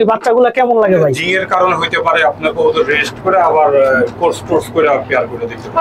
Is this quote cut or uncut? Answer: cut